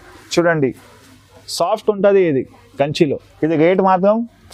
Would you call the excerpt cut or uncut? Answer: uncut